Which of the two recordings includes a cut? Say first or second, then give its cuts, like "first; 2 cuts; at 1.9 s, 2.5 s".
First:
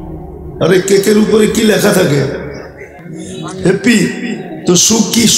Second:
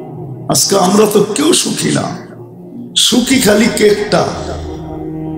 second; 1 cut; at 4.4 s